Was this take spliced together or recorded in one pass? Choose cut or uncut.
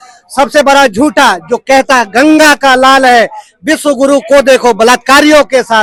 uncut